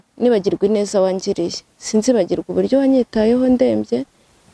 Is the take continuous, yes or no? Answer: yes